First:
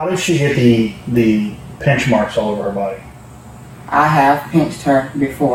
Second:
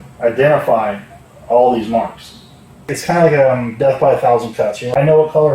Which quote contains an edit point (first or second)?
second